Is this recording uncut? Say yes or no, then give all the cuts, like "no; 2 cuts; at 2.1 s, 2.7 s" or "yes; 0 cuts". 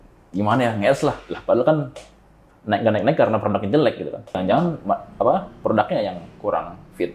no; 1 cut; at 4.3 s